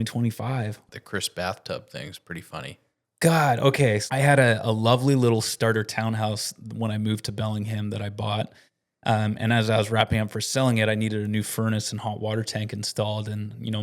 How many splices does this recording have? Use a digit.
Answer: 2